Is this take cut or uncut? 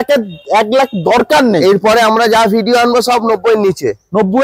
uncut